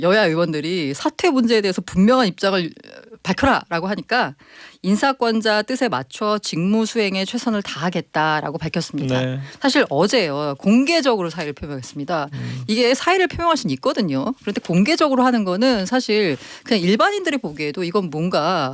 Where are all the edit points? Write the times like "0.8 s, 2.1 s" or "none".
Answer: none